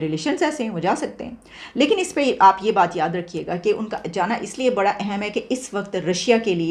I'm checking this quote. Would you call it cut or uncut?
uncut